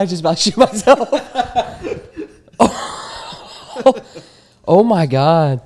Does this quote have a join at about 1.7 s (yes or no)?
no